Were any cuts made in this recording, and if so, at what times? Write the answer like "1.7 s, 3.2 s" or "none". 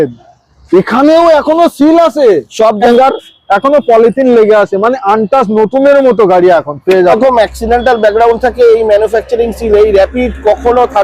2.8 s, 7.2 s